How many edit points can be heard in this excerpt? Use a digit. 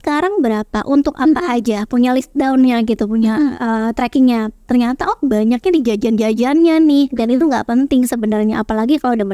0